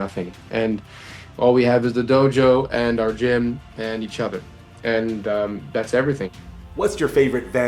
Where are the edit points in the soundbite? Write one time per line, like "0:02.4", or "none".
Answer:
0:06.3

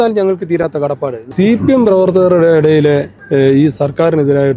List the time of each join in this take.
0:01.2
0:03.2

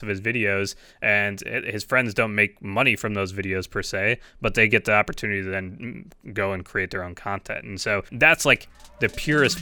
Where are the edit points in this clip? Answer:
0:08.1

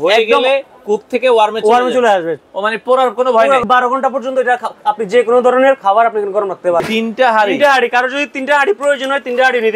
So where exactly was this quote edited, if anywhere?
0:03.6
0:06.8

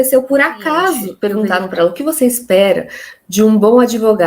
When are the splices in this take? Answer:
0:01.1

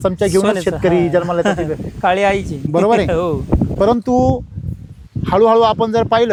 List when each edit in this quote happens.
none

